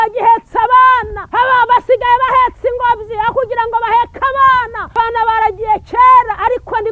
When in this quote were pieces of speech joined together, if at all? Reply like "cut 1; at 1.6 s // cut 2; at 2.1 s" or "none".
cut 1; at 1.2 s // cut 2; at 4.8 s